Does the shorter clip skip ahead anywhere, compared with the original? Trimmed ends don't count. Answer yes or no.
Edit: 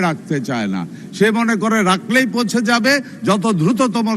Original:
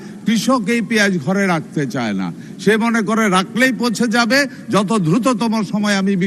no